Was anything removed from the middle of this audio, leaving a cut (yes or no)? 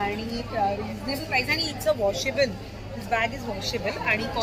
no